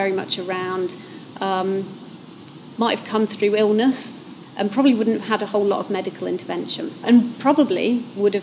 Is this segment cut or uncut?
cut